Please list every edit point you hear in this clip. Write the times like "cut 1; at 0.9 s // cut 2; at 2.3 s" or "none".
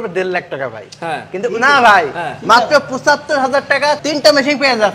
cut 1; at 4.0 s

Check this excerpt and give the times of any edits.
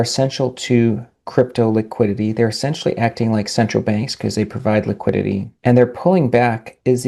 cut 1; at 5.5 s

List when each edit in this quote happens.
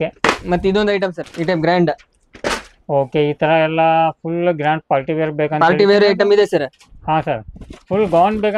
cut 1; at 1.2 s

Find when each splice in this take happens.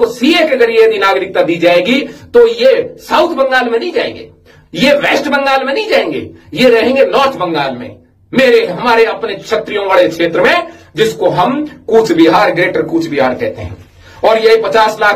none

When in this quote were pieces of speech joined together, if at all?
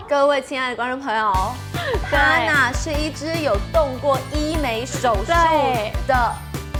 none

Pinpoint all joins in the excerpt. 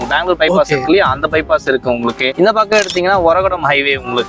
none

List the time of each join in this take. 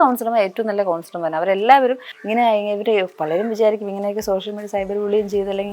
cut 1; at 2.1 s

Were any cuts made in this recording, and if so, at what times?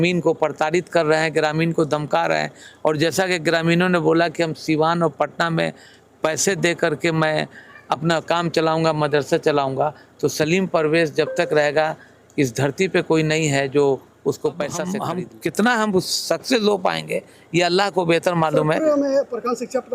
cut 1; at 15.0 s

